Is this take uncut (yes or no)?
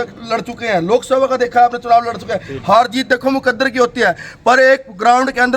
yes